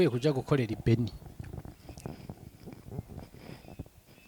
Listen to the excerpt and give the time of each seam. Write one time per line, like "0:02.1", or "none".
none